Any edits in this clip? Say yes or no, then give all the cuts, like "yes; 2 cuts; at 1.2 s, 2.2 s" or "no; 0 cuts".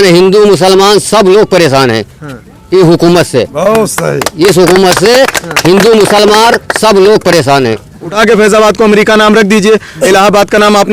yes; 2 cuts; at 8.1 s, 10.0 s